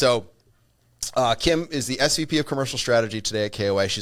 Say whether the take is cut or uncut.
uncut